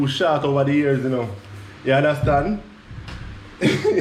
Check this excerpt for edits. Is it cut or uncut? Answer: uncut